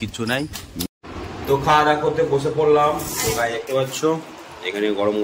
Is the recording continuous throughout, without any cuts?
no; 1 cut; at 1.0 s

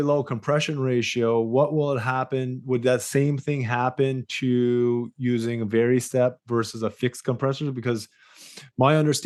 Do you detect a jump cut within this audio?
no; 0 cuts

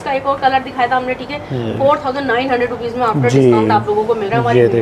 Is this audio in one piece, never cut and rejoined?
yes; 0 cuts

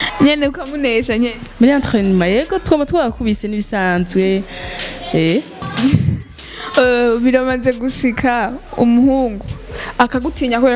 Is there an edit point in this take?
no; 0 cuts

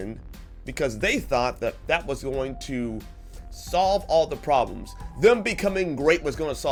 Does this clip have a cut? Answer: no; 0 cuts

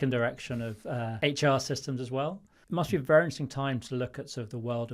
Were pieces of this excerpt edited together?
yes; 2 cuts; at 1.1 s, 2.5 s

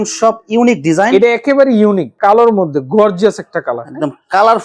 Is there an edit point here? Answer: yes; 1 cut; at 2.1 s

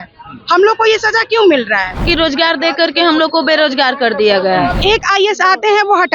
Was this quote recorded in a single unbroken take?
no; 2 cuts; at 2.0 s, 4.8 s

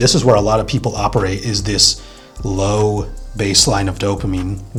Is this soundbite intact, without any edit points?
yes; 0 cuts

